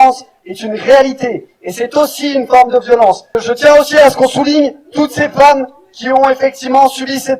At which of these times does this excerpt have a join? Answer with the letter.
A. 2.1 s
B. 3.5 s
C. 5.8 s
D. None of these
B